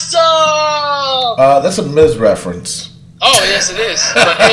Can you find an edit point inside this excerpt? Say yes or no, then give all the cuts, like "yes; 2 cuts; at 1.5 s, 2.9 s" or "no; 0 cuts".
no; 0 cuts